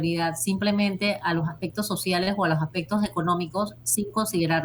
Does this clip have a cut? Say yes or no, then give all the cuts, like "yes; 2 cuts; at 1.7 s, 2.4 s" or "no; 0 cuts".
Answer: no; 0 cuts